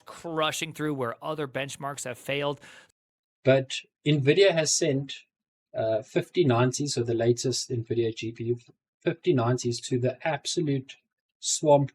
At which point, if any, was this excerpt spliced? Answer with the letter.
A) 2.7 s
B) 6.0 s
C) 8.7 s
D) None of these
A